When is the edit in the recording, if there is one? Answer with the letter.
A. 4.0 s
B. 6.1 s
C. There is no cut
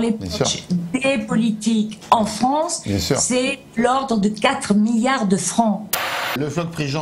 B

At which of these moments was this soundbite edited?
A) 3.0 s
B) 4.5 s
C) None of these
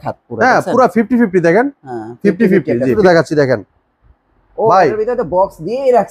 A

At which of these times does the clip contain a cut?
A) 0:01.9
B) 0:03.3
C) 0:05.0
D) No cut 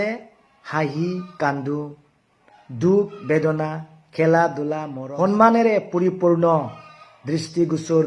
C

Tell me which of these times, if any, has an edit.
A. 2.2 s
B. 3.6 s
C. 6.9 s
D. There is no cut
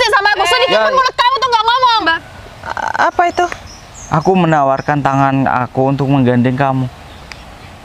A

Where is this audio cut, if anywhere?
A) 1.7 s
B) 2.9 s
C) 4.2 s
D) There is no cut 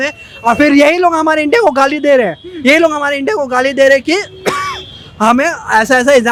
D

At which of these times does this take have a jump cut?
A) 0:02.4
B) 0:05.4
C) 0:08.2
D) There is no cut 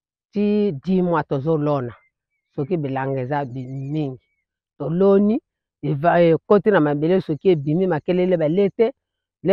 D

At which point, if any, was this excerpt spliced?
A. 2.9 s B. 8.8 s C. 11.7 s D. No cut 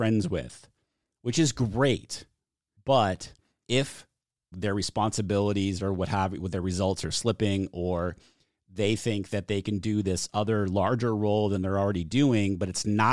D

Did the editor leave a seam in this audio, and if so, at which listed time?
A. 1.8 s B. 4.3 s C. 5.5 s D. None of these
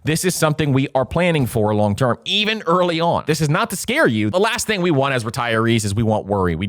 B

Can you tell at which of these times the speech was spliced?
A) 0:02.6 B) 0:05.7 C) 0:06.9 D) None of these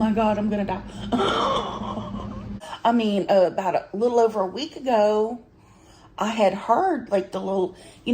A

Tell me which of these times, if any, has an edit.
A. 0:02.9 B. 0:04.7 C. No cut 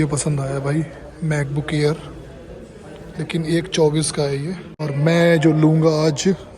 B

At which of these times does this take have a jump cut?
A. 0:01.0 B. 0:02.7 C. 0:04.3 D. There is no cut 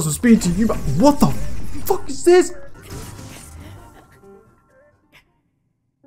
B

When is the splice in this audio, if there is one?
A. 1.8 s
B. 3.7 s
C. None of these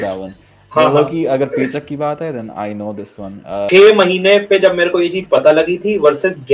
B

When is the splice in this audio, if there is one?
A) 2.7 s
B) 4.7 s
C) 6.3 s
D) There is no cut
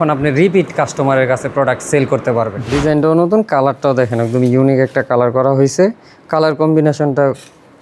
A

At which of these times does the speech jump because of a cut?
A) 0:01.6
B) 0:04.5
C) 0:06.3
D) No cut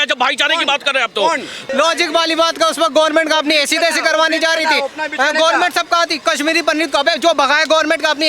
A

